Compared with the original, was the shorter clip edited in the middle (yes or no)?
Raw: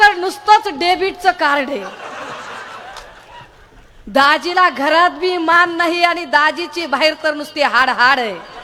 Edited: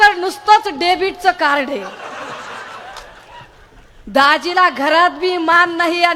no